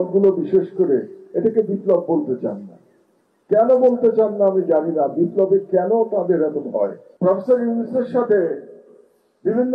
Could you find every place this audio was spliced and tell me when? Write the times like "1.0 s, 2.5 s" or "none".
7.0 s